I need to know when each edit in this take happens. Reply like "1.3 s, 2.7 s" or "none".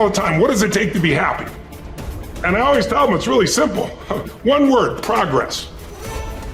5.6 s